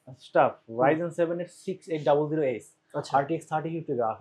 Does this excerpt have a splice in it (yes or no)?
no